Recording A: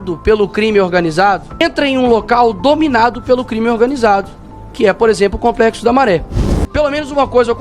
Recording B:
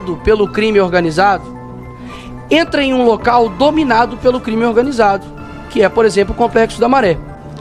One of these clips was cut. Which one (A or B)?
A